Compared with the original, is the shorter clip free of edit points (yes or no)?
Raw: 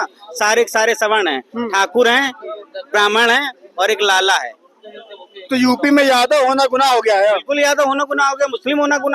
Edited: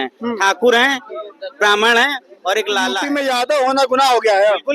no